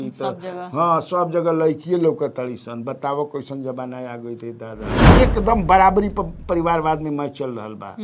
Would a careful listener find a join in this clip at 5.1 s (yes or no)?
yes